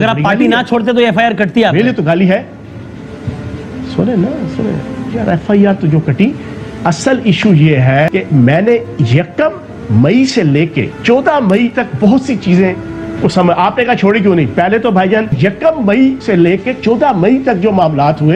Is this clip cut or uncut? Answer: uncut